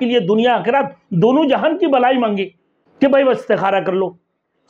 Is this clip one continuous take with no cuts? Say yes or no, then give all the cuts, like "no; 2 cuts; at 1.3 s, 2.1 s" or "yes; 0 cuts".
no; 1 cut; at 2.8 s